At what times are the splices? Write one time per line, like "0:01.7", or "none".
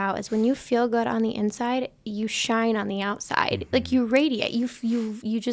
none